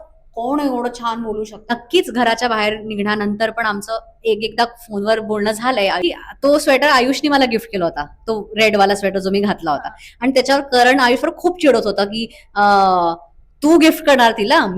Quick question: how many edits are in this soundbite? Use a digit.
2